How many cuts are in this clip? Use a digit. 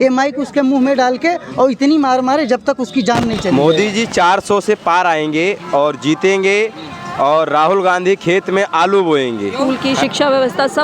2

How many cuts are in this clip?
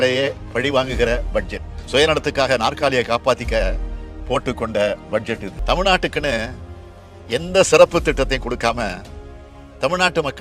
1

